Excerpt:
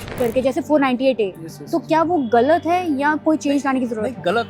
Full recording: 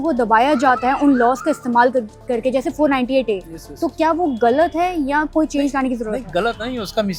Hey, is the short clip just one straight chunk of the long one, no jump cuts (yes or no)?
yes